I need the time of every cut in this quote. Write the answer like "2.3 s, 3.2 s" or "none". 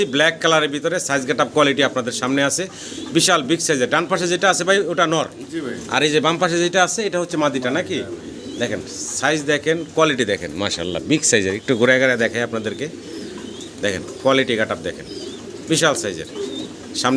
none